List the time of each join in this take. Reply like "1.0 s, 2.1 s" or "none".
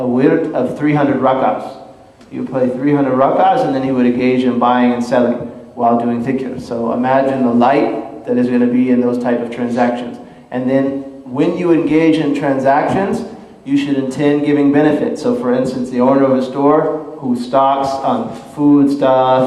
11.0 s